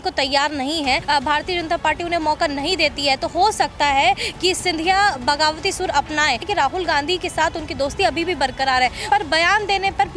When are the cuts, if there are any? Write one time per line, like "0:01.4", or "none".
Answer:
0:01.0
0:06.5
0:09.0